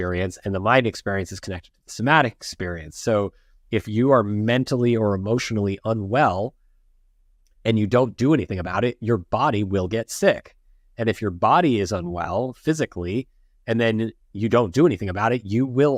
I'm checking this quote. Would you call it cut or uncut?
uncut